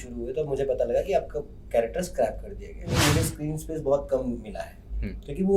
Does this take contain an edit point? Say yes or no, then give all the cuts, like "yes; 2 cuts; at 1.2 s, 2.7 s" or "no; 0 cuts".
yes; 1 cut; at 2.9 s